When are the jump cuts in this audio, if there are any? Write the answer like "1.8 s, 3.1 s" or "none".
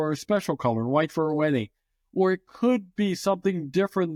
none